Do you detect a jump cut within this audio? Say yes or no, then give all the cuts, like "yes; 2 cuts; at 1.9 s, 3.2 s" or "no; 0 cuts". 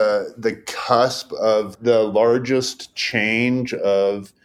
yes; 1 cut; at 1.7 s